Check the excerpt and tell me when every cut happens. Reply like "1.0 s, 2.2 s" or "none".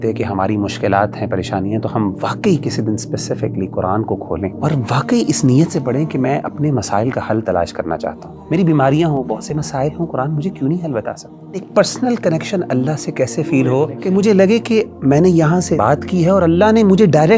4.6 s, 8.3 s, 11.7 s, 14.0 s, 15.8 s

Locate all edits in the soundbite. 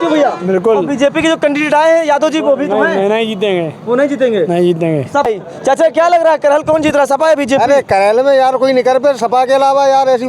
5.3 s

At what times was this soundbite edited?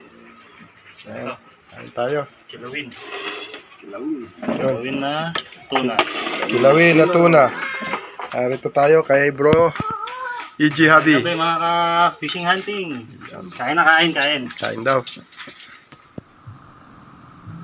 16.4 s

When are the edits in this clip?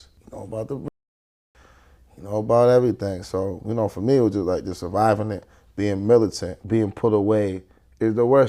6.5 s

